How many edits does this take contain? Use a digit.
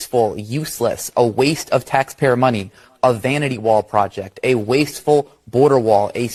0